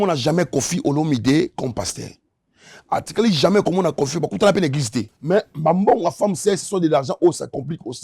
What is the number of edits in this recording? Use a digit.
1